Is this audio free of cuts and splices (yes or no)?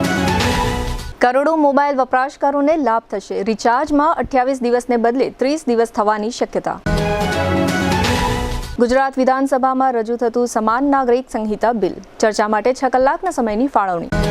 no